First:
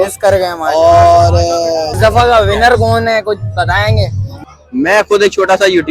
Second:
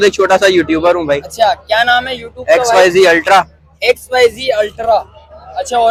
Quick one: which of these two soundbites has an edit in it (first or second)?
first